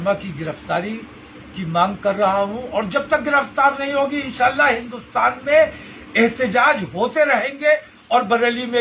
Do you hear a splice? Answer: no; 0 cuts

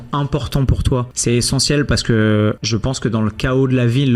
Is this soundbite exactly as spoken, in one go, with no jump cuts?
no; 2 cuts; at 1.1 s, 2.7 s

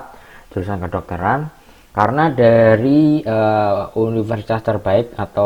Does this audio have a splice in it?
no; 0 cuts

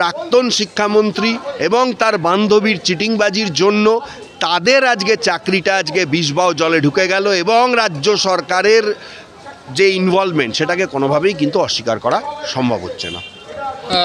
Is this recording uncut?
yes; 0 cuts

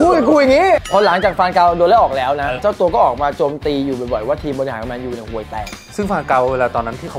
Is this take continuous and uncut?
no; 2 cuts; at 0.9 s, 2.6 s

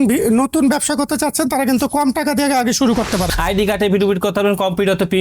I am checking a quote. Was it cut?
yes; 1 cut; at 3.3 s

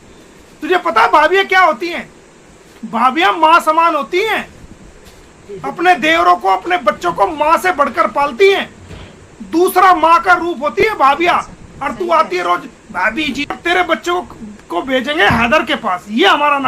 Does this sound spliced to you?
yes; 1 cut; at 13.6 s

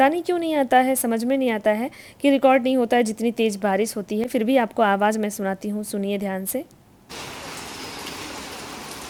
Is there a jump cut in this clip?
no; 0 cuts

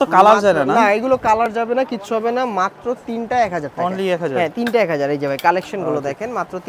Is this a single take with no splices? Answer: yes; 0 cuts

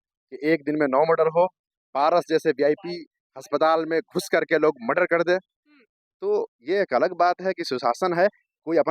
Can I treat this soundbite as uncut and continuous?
yes; 0 cuts

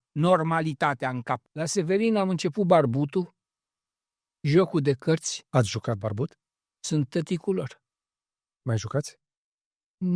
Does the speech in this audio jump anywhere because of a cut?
yes; 1 cut; at 1.5 s

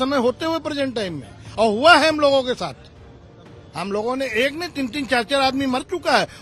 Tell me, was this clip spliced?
no; 0 cuts

